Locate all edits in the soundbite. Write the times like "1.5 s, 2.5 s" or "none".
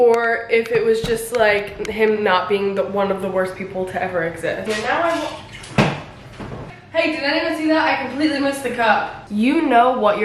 4.7 s, 6.7 s, 9.2 s